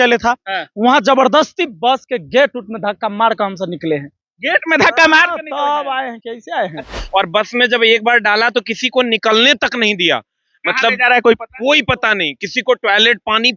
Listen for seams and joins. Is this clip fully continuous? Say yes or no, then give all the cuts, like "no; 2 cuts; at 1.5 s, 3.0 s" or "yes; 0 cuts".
no; 1 cut; at 6.9 s